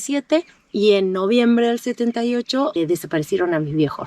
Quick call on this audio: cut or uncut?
cut